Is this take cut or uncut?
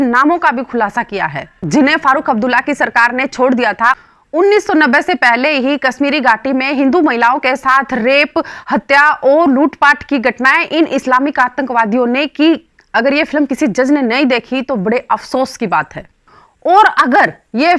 cut